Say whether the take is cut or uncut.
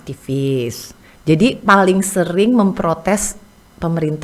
uncut